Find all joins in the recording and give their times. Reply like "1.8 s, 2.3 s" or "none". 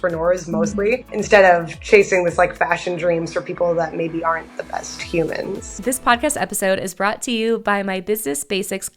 1.1 s, 5.7 s